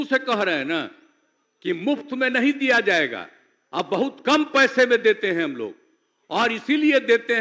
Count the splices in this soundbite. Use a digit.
0